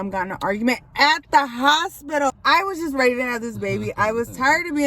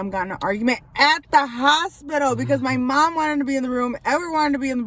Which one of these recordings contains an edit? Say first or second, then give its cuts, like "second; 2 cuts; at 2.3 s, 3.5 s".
first; 1 cut; at 2.3 s